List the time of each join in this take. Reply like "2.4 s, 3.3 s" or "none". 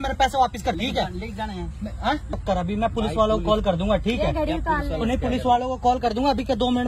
0.8 s, 2.3 s